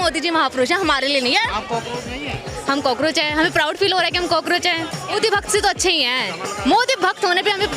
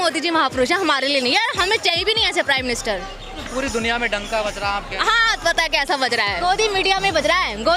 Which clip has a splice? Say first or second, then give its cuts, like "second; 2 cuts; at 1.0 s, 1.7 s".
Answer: first; 2 cuts; at 1.5 s, 5.1 s